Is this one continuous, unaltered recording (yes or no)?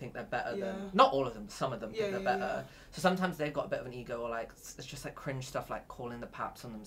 yes